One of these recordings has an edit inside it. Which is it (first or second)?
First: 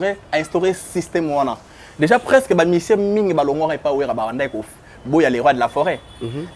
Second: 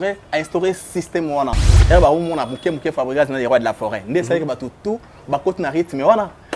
second